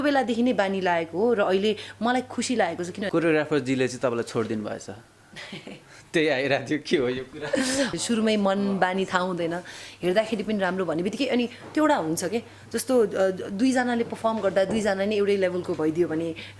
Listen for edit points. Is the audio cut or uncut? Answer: cut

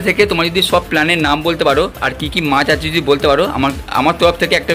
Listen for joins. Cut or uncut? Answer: uncut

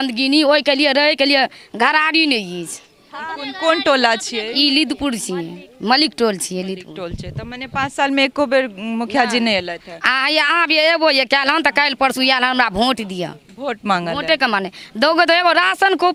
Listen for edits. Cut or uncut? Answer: uncut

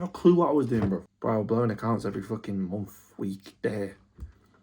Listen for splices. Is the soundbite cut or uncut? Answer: cut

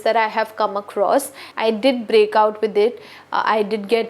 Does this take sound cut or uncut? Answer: cut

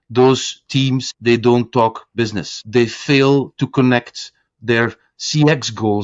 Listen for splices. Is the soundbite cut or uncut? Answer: cut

